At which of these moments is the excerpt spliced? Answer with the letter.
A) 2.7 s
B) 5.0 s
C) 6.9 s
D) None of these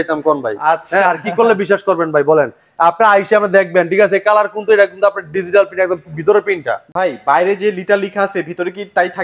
C